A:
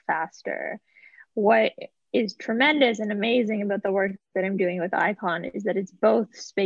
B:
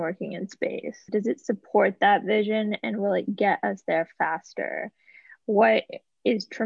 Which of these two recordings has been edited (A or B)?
B